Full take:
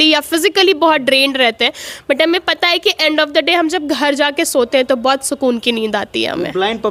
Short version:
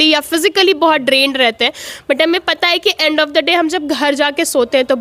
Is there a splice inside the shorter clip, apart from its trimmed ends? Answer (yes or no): no